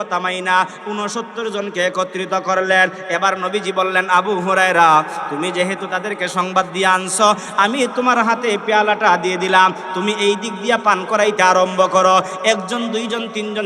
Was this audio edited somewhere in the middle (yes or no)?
no